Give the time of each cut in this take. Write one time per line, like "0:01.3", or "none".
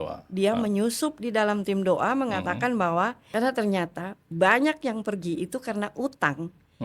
0:03.2